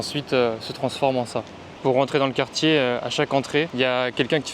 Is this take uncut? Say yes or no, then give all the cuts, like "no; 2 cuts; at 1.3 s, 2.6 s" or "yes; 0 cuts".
no; 1 cut; at 1.6 s